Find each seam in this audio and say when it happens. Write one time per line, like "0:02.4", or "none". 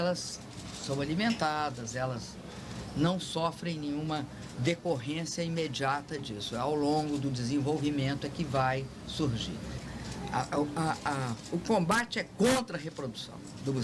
none